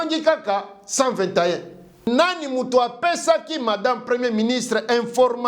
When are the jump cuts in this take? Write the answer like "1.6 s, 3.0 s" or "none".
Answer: 2.1 s